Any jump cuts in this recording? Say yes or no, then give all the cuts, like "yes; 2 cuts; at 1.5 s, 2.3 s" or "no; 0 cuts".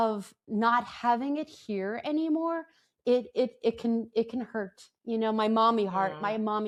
no; 0 cuts